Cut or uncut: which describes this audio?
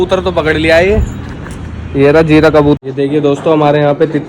cut